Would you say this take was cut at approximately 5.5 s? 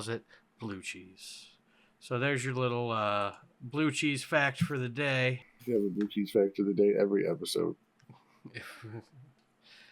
yes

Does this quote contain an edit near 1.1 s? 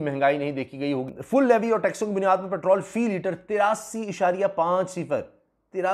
yes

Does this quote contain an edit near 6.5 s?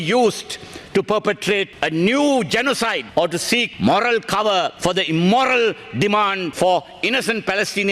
yes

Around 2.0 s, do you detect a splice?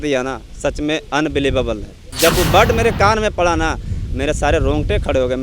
yes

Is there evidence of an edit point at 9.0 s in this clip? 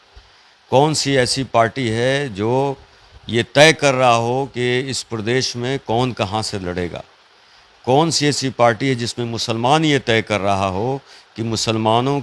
no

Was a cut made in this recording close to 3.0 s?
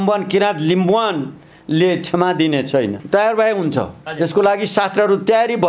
yes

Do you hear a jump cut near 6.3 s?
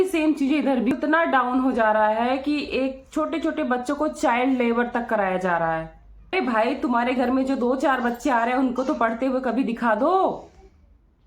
yes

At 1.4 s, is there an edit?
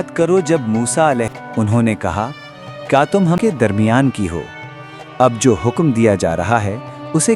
yes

